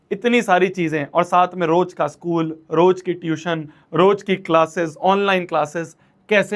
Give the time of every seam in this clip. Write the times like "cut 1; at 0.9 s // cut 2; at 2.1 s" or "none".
none